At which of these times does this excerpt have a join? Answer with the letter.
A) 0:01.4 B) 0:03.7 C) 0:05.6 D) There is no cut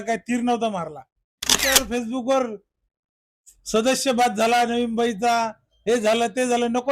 A